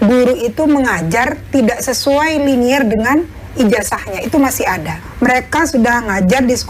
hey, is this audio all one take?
no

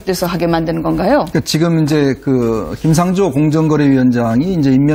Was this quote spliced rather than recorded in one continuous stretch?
no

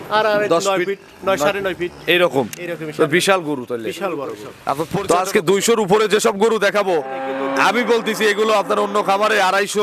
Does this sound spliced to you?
yes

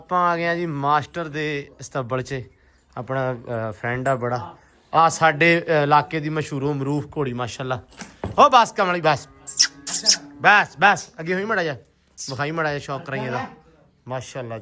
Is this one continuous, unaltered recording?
yes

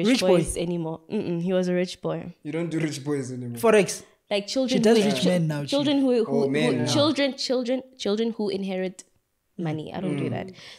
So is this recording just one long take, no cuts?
yes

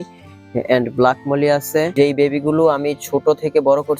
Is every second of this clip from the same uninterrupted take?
no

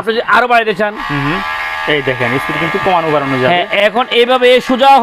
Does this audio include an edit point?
no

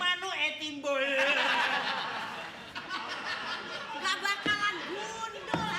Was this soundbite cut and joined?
no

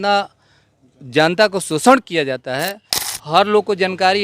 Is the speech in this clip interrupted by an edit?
yes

